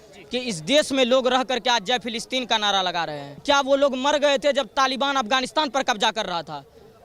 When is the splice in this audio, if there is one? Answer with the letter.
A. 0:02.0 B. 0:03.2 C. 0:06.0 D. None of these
B